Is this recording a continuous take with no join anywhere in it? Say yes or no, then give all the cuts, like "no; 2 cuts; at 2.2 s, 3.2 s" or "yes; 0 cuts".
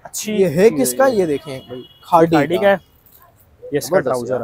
yes; 0 cuts